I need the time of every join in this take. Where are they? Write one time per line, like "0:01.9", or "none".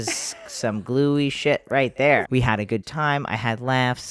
0:02.3